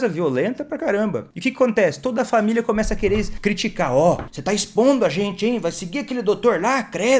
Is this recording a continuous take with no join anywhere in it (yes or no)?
no